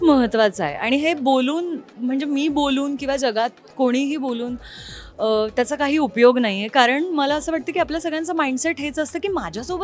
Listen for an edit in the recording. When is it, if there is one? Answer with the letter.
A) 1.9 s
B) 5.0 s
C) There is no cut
C